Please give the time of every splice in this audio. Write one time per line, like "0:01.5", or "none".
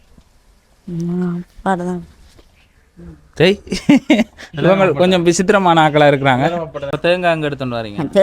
0:06.9